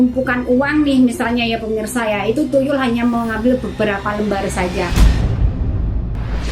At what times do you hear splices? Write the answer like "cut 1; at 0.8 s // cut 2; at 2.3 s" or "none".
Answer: cut 1; at 4.9 s